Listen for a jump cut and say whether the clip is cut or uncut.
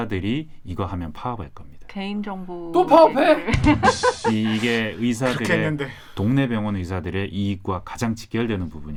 uncut